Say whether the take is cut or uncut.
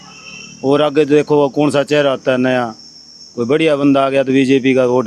uncut